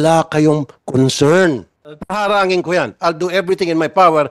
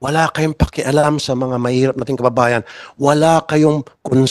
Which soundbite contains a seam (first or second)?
first